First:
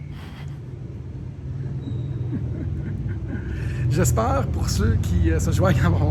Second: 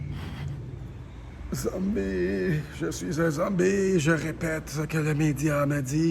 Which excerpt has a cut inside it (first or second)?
second